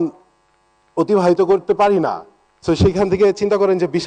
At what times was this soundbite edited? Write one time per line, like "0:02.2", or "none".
none